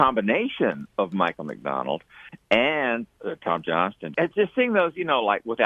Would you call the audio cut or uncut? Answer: cut